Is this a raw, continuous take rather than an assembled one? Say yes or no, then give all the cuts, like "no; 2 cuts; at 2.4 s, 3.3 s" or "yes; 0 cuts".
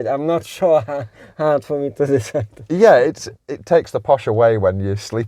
yes; 0 cuts